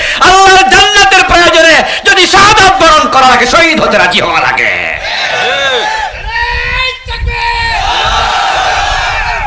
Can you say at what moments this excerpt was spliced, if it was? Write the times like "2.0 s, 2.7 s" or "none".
none

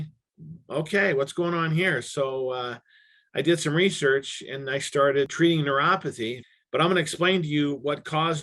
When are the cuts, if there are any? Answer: 5.3 s, 6.4 s

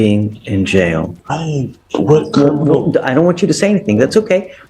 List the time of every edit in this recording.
1.1 s

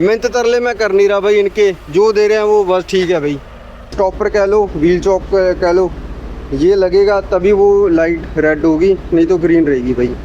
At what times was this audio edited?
3.9 s

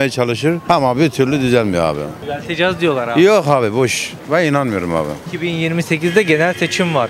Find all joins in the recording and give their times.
2.1 s, 5.2 s

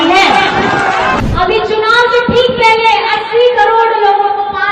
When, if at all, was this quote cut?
1.2 s

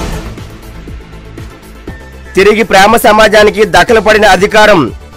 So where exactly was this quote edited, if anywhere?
2.1 s

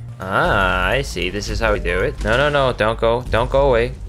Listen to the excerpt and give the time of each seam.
1.9 s

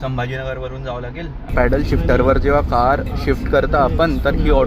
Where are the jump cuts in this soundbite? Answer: 1.5 s

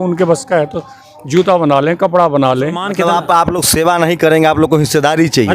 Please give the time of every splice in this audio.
2.8 s

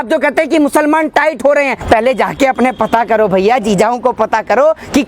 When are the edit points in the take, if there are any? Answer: 1.8 s

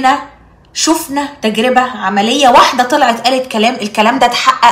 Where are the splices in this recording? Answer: none

